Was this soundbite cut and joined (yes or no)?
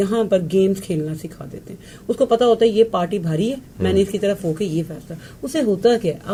no